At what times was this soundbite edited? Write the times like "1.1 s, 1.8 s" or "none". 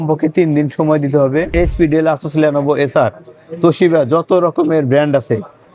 1.5 s